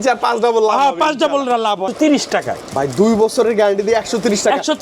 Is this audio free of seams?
no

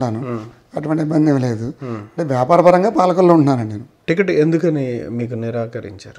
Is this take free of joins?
no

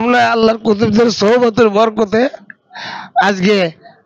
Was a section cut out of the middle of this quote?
no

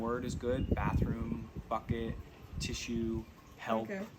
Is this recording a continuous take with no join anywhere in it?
yes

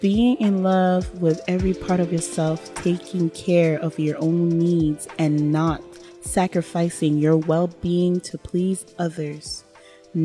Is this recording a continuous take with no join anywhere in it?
yes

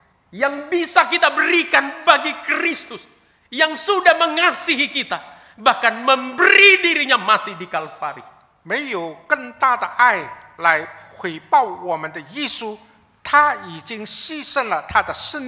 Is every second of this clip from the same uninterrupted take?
yes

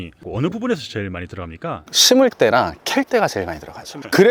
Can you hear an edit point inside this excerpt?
no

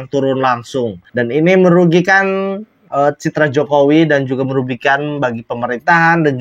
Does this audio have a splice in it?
yes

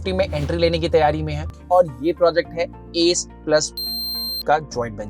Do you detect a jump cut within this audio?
yes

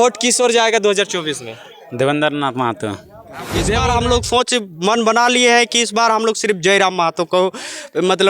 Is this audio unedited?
no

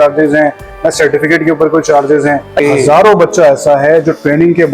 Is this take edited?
yes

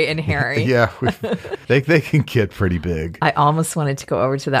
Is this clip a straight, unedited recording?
no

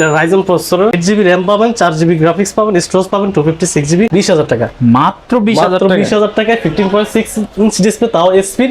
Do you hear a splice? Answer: yes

